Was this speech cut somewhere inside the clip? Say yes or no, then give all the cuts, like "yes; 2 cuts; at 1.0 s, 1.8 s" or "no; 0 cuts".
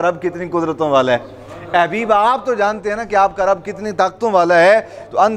no; 0 cuts